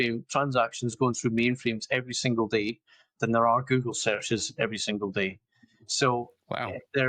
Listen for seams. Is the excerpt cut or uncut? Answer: uncut